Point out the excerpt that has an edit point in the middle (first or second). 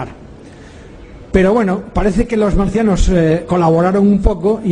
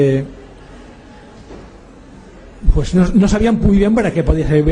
second